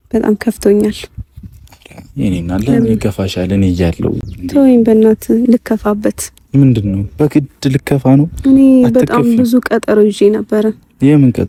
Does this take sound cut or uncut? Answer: uncut